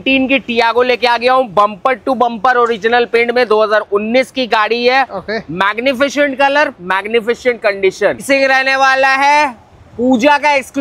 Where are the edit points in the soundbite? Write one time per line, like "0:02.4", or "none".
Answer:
0:08.2